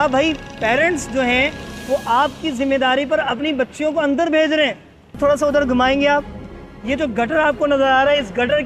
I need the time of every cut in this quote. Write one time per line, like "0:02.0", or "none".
0:05.2